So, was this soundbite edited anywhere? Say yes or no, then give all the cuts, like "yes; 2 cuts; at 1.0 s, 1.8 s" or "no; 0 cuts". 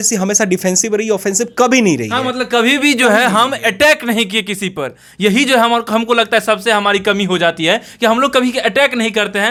no; 0 cuts